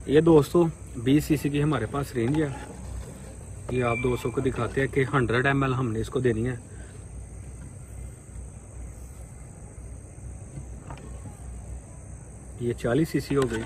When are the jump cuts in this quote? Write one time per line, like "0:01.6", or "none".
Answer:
none